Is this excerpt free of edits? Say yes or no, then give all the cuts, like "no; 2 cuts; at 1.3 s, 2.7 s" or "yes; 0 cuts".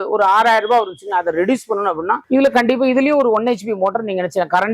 no; 1 cut; at 2.2 s